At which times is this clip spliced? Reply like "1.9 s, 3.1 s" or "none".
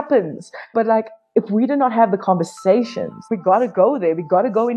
3.2 s